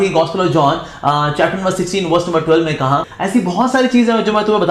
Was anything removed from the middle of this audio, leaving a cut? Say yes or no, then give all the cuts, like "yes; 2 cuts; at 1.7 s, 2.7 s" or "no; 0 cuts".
yes; 1 cut; at 3.1 s